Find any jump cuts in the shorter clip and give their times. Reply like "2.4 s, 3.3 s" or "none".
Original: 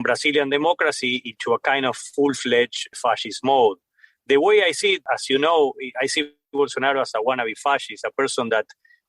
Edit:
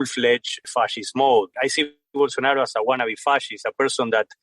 1.5 s